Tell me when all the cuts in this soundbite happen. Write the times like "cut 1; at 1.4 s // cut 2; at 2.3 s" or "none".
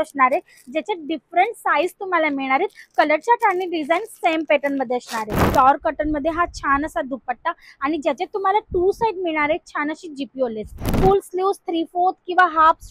cut 1; at 5.5 s // cut 2; at 10.8 s